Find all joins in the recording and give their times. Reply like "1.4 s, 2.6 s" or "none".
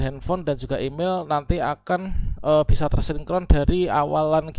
none